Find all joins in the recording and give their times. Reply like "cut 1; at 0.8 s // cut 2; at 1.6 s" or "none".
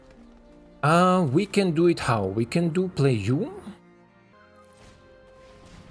cut 1; at 4.3 s